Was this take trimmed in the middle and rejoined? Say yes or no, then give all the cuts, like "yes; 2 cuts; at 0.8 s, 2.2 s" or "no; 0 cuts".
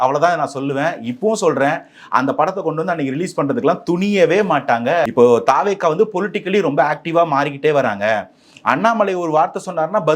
yes; 1 cut; at 5.1 s